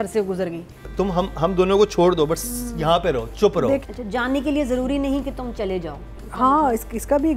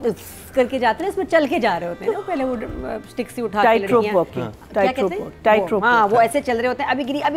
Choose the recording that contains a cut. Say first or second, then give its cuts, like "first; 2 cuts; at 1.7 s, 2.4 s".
first; 3 cuts; at 0.8 s, 3.8 s, 6.2 s